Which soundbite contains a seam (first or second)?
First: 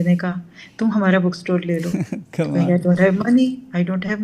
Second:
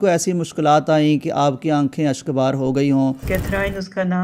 second